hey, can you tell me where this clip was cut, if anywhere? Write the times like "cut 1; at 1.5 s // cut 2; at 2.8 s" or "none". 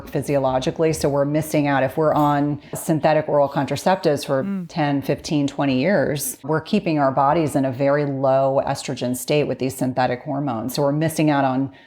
cut 1; at 2.8 s // cut 2; at 6.5 s